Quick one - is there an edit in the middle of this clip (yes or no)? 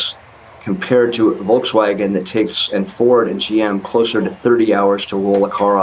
no